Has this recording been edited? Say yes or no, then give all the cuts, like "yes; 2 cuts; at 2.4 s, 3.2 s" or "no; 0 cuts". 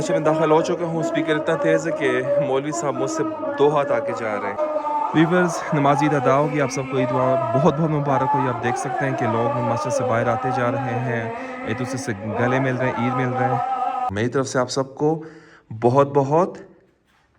yes; 2 cuts; at 4.6 s, 14.1 s